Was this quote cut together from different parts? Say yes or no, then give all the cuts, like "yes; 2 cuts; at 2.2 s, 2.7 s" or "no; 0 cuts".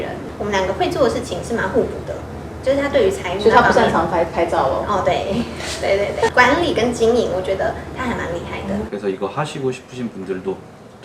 yes; 1 cut; at 8.9 s